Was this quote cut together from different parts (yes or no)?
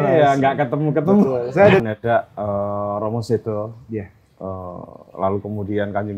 yes